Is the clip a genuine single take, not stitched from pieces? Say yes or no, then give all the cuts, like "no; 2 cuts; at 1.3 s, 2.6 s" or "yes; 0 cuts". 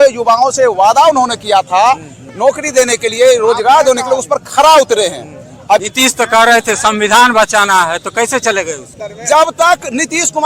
no; 2 cuts; at 5.8 s, 8.8 s